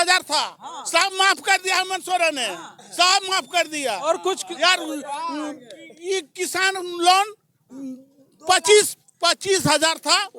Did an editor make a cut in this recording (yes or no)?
no